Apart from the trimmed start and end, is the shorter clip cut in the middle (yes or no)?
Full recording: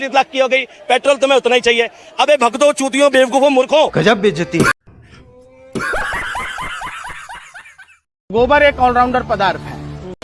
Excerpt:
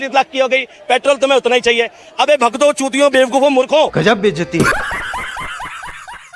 yes